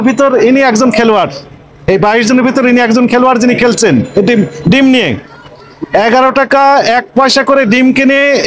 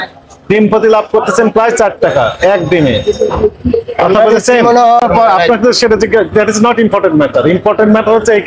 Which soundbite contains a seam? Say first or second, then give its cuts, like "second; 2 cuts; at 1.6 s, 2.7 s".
second; 1 cut; at 5.0 s